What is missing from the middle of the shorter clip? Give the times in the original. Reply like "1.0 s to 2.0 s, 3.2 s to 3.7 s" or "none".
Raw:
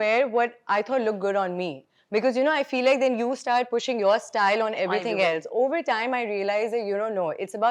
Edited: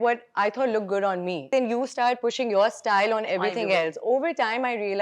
1.8 s to 3.0 s